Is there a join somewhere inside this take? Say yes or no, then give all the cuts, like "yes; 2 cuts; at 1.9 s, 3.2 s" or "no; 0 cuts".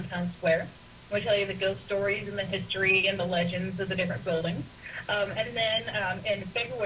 no; 0 cuts